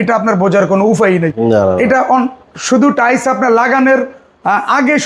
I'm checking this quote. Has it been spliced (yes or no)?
no